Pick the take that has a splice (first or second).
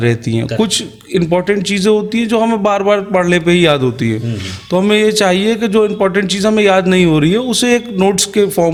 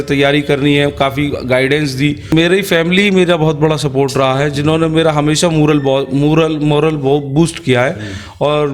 second